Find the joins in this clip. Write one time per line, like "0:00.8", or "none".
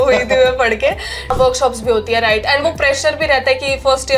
0:01.3